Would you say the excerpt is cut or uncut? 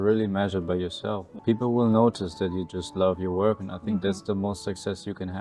cut